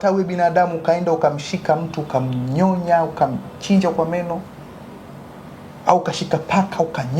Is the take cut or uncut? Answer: uncut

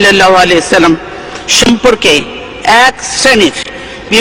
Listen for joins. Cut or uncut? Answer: uncut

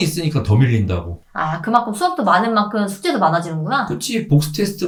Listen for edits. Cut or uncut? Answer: uncut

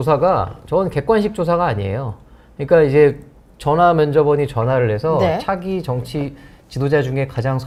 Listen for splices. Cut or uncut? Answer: uncut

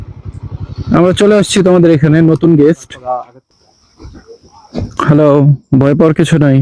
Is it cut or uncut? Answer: cut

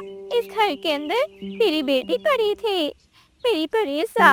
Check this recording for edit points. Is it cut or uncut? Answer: uncut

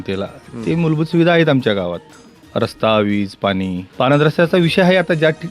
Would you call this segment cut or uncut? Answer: cut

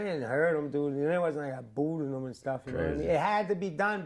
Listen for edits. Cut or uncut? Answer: uncut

